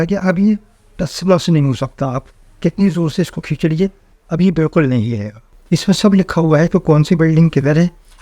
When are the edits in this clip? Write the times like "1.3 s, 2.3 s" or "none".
5.6 s